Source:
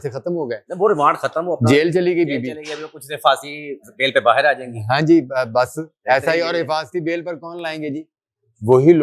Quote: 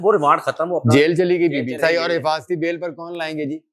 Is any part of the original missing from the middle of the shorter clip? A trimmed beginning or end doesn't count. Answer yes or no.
yes